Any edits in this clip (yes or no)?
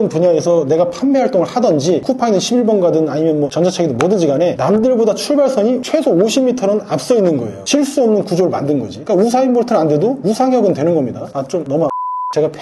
no